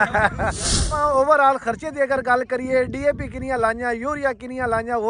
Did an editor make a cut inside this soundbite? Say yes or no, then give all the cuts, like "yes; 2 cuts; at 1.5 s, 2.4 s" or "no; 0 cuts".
yes; 1 cut; at 0.9 s